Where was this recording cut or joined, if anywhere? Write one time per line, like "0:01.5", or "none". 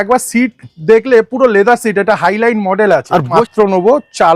0:03.4